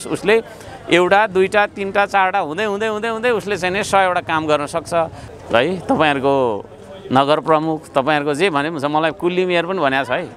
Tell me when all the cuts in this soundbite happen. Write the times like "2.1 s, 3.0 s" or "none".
5.2 s